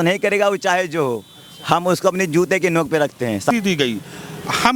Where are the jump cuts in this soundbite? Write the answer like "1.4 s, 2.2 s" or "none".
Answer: none